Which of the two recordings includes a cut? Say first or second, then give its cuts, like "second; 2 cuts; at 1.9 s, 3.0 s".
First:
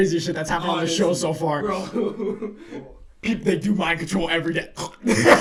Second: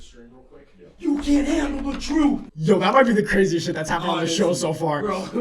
second; 1 cut; at 2.5 s